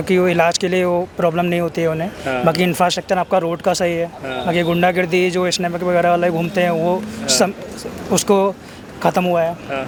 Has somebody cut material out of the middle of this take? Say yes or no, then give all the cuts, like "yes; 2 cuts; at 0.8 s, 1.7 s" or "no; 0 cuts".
no; 0 cuts